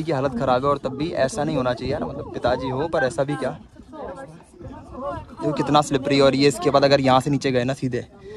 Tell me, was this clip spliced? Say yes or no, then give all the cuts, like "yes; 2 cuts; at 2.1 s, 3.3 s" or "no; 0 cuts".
no; 0 cuts